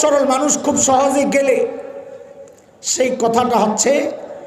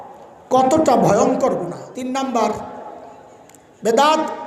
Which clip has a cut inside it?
second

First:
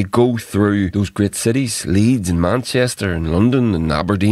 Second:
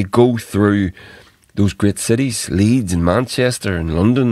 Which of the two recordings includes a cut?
first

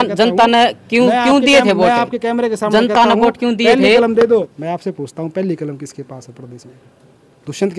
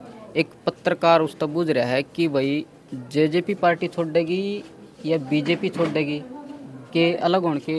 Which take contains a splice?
first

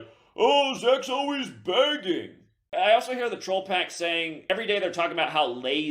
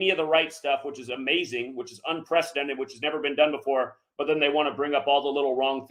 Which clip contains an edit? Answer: first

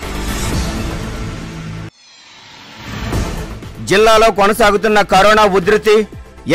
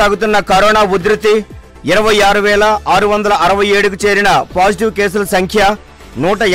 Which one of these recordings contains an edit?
first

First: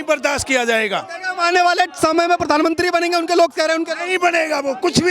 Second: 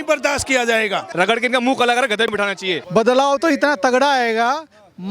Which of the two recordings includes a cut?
second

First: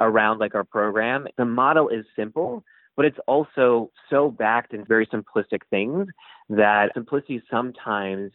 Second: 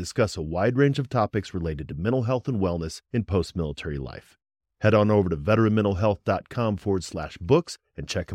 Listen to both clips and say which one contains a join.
first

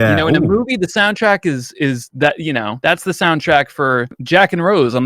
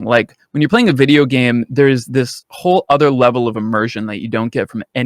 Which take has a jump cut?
first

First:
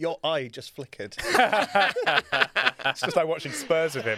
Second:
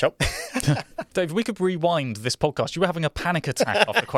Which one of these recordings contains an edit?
second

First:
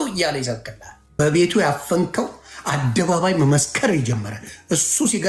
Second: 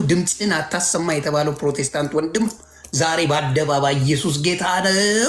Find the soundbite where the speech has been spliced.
first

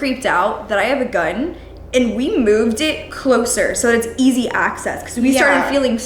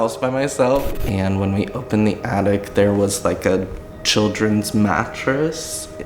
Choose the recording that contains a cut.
second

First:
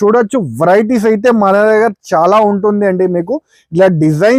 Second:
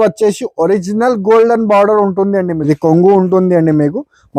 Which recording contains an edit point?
second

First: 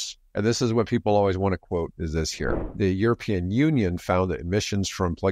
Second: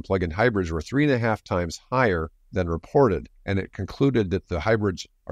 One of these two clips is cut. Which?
first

